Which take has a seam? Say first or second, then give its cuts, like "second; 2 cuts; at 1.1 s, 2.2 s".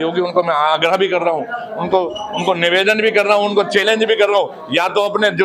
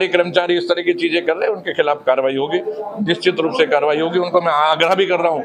second; 1 cut; at 2.9 s